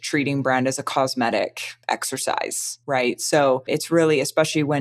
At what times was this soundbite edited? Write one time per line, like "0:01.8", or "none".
0:01.7
0:02.7
0:03.7